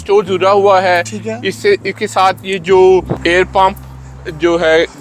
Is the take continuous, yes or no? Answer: no